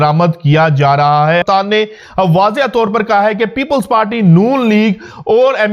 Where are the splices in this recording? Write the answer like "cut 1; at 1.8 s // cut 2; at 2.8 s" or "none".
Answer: cut 1; at 1.4 s